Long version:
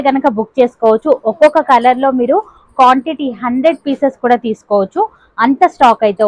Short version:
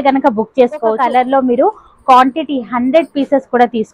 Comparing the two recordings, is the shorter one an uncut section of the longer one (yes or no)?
no